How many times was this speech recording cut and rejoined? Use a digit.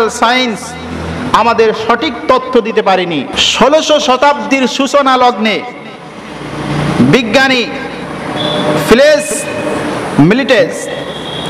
1